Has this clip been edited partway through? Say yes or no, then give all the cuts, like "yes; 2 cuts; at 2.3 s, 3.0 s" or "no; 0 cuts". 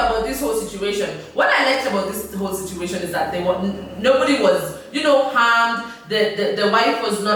no; 0 cuts